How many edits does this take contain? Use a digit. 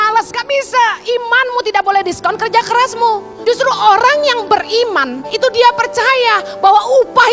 2